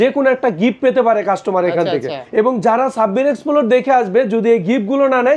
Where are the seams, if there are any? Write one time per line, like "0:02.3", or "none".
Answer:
0:02.2